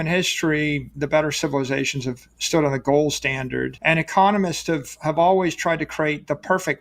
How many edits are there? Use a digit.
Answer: 2